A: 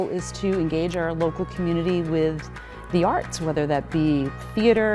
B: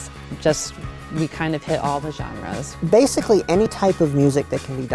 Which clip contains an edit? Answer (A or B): B